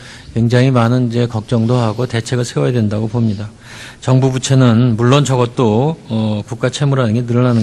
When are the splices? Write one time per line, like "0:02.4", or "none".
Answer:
0:06.3